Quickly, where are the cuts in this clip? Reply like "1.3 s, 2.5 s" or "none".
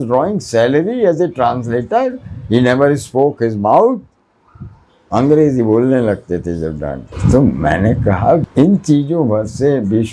7.1 s, 8.5 s

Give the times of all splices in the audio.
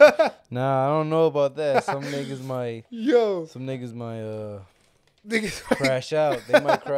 none

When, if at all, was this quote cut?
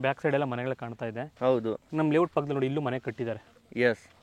none

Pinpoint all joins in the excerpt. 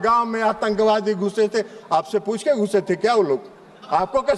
none

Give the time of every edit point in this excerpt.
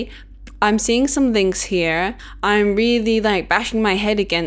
2.3 s

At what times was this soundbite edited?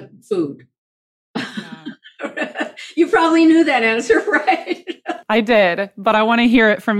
none

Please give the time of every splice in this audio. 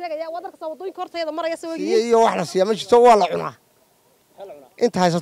2.1 s

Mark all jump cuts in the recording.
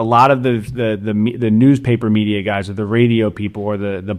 none

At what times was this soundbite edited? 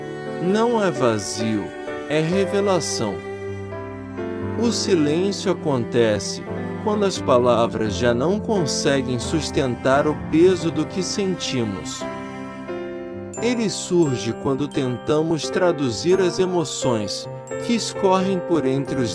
none

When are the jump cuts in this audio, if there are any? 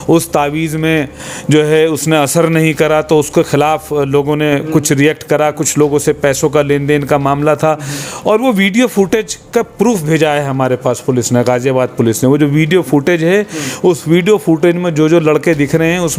none

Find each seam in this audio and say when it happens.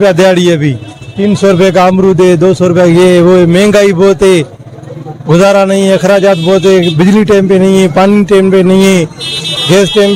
none

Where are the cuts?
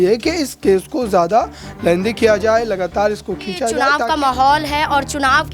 3.9 s

